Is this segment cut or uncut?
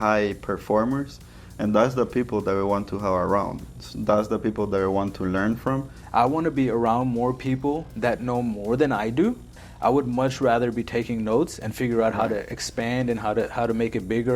cut